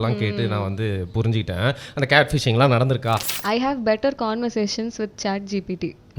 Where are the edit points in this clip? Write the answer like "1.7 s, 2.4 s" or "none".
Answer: 3.3 s